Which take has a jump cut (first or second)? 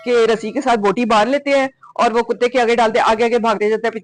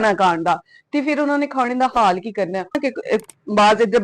second